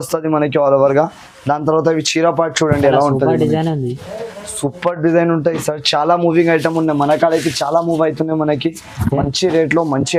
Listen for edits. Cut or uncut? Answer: uncut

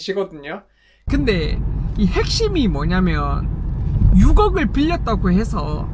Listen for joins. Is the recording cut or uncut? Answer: cut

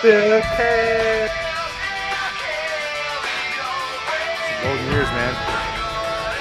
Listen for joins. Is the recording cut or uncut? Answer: uncut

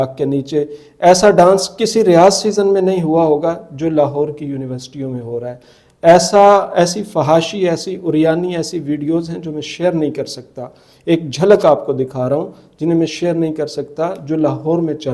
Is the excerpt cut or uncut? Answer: uncut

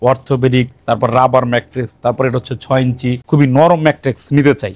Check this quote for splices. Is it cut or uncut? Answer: cut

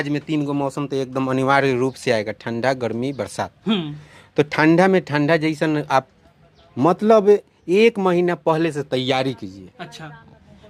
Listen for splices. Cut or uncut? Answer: uncut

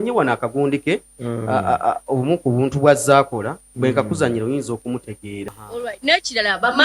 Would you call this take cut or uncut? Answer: cut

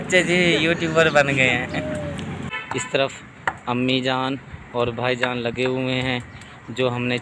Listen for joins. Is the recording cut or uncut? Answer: cut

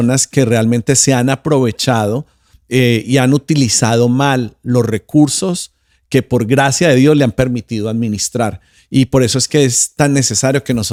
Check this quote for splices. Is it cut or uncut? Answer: uncut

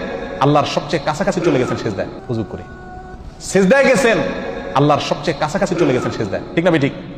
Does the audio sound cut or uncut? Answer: cut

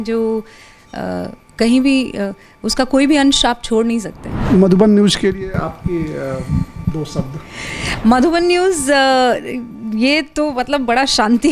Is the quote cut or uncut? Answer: cut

